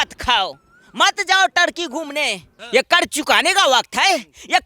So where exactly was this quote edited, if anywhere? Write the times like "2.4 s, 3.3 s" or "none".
2.5 s